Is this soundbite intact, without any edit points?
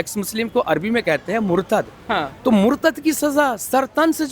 yes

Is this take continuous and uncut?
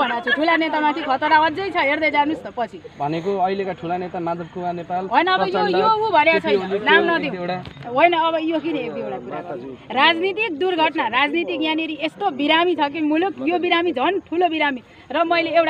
yes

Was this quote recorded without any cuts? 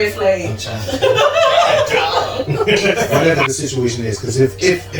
no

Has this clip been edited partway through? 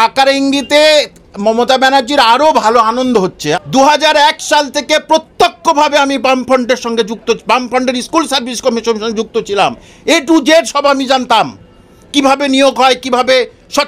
yes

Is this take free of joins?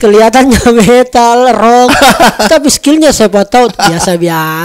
yes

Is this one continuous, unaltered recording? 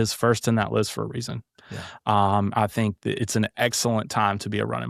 yes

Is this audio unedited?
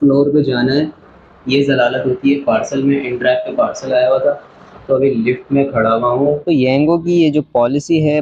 no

